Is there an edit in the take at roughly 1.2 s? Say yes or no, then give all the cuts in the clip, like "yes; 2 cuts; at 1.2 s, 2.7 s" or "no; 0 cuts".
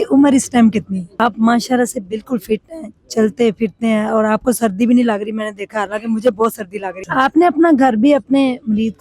yes; 2 cuts; at 1.2 s, 7.0 s